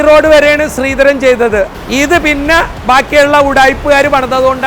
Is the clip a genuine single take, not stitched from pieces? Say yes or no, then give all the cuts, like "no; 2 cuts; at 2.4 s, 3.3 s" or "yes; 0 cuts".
no; 1 cut; at 1.7 s